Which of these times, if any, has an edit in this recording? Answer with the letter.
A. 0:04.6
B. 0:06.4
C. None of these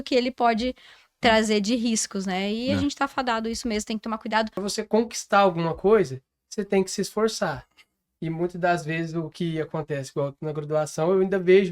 A